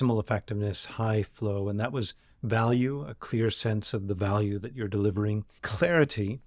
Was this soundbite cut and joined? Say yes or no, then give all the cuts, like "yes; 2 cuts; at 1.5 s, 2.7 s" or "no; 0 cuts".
yes; 1 cut; at 5.5 s